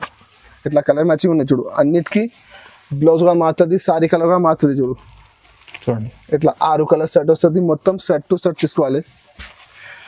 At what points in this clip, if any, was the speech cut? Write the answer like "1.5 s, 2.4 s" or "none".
none